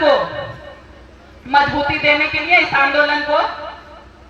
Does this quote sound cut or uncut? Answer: uncut